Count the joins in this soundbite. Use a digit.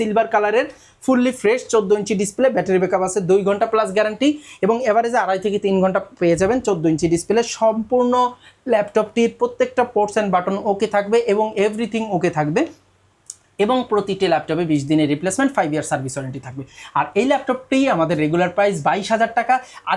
0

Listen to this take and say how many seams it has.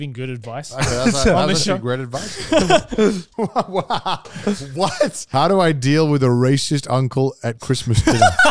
2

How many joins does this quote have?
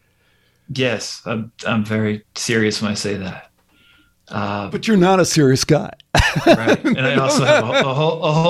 0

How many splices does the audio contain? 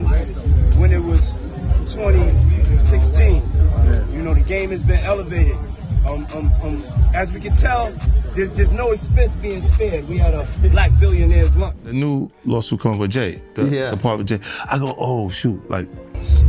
1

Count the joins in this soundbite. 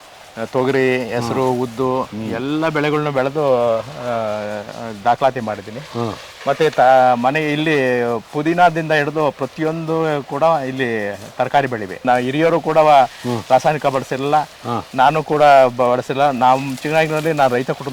1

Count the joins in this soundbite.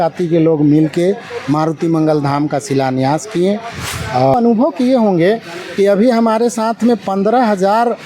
1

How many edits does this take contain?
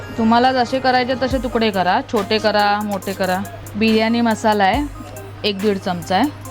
1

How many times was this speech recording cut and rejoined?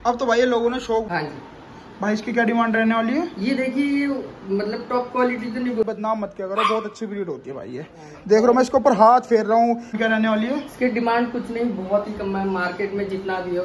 3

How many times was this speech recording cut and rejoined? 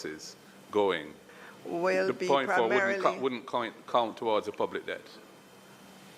1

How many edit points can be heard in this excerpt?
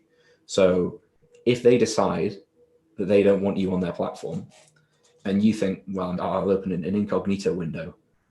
1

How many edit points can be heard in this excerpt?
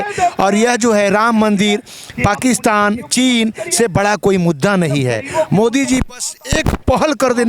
0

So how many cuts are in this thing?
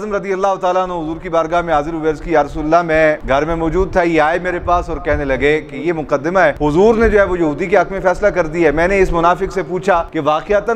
0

